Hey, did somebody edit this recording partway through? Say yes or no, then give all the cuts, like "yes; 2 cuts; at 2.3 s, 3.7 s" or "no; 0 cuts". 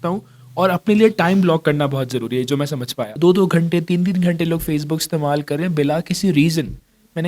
yes; 1 cut; at 3.0 s